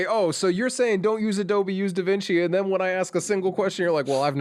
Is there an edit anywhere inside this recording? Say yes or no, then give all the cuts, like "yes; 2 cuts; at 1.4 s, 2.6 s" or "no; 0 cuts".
no; 0 cuts